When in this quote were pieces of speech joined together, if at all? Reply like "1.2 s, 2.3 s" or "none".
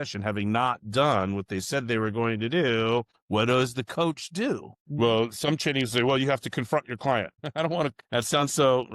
8.0 s